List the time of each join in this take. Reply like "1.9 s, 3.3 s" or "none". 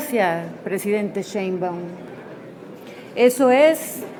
none